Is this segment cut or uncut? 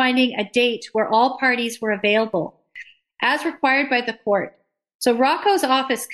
uncut